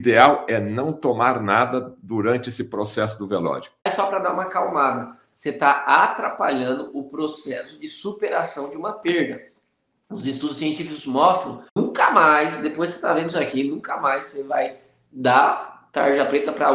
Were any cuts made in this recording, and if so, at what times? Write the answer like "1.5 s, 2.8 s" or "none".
3.9 s, 11.8 s

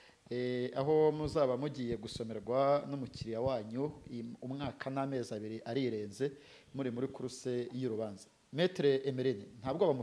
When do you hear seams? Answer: none

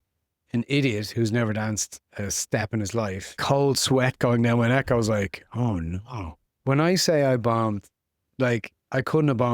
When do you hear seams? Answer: 3.4 s, 5.9 s

